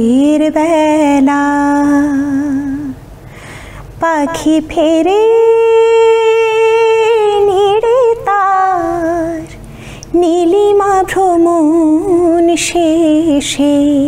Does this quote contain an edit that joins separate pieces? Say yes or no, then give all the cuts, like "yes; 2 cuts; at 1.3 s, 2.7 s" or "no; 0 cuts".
no; 0 cuts